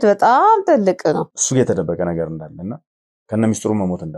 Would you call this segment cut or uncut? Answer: cut